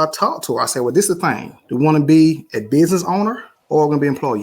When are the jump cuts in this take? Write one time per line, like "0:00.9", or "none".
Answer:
0:01.5
0:03.5